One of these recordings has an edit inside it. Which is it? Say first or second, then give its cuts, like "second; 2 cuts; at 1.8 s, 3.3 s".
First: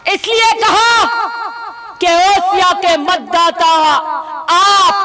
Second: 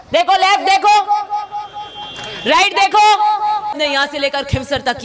second; 1 cut; at 3.8 s